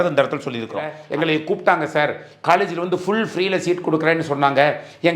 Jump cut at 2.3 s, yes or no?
no